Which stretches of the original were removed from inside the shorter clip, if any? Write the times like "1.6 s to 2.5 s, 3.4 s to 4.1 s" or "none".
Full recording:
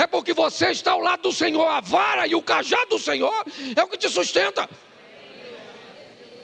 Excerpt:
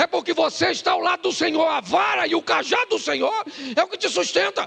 none